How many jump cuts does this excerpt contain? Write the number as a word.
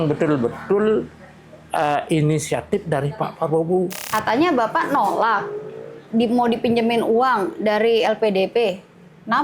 one